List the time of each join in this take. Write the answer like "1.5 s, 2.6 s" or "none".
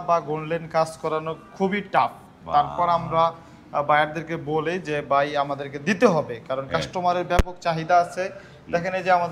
none